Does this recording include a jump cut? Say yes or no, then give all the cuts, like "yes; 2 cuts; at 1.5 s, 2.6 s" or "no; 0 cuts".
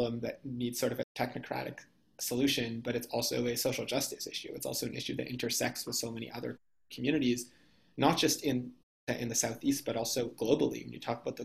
yes; 2 cuts; at 1.1 s, 8.7 s